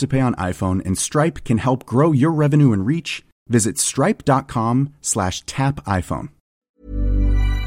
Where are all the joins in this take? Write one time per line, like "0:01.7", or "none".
0:06.5